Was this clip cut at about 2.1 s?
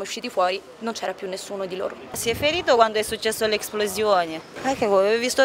yes; 1 cut; at 2.1 s

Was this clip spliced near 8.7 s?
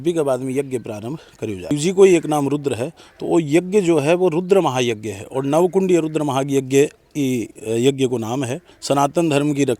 yes; 2 cuts; at 1.7 s, 8.7 s

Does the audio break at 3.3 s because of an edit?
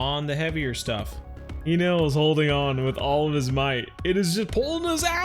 no; 1 cut; at 1.6 s

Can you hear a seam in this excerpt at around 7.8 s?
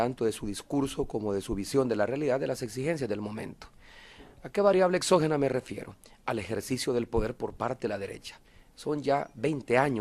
yes; 1 cut; at 7.8 s

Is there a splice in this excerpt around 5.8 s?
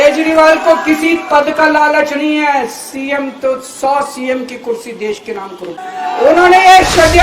yes; 1 cut; at 5.8 s

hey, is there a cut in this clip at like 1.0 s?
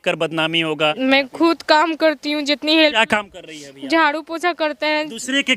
yes; 1 cut; at 1.0 s

